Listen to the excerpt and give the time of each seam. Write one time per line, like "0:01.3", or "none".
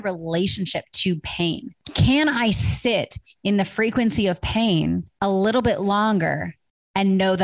0:01.8
0:05.1